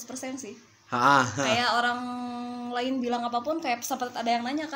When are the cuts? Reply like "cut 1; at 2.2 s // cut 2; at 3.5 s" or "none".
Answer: none

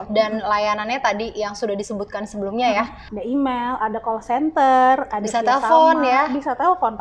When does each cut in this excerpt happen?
cut 1; at 3.1 s

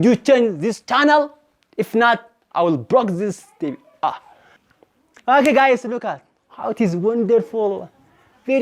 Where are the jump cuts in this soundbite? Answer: cut 1; at 4.5 s

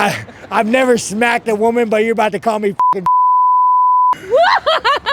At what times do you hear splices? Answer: cut 1; at 4.2 s

